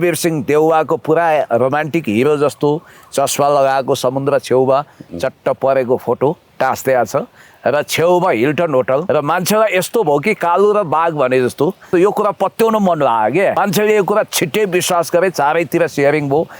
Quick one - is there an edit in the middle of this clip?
yes; 3 cuts; at 9.0 s, 11.9 s, 13.6 s

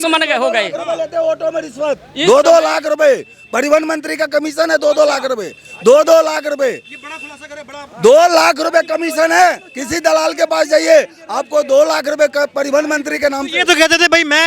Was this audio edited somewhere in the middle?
no; 0 cuts

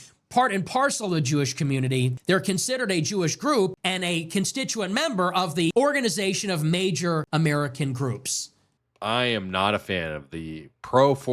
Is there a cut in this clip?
yes; 5 cuts; at 2.2 s, 3.8 s, 5.7 s, 7.3 s, 8.5 s

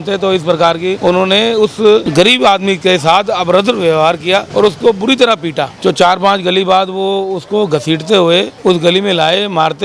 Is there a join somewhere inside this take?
yes; 5 cuts; at 1.0 s, 2.1 s, 4.5 s, 5.7 s, 8.5 s

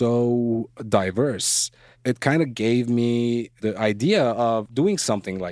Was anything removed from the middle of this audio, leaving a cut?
yes; 3 cuts; at 1.9 s, 3.6 s, 4.7 s

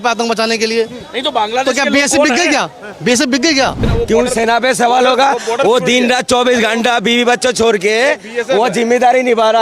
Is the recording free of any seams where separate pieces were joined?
no; 1 cut; at 3.8 s

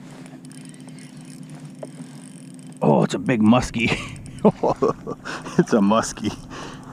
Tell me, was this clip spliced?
no; 0 cuts

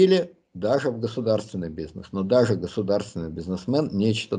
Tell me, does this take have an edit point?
no; 0 cuts

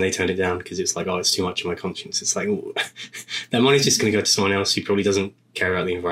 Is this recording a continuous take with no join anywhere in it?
yes; 0 cuts

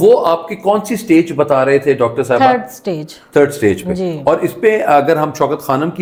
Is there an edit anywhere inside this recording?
no; 0 cuts

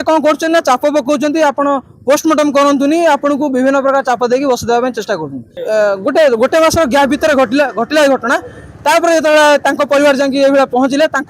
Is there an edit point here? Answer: yes; 1 cut; at 5.5 s

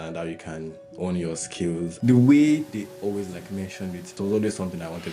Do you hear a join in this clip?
yes; 2 cuts; at 1.9 s, 4.1 s

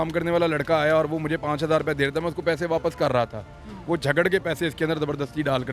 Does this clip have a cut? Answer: no; 0 cuts

